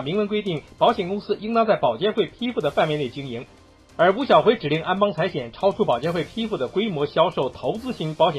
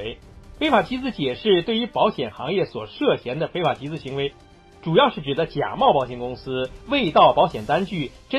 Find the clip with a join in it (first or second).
first